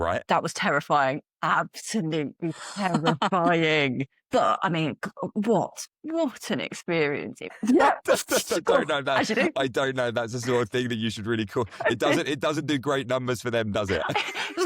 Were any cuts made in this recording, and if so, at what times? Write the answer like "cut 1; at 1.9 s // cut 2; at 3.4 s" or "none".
cut 1; at 7.5 s